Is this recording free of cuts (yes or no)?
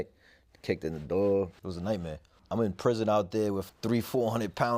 no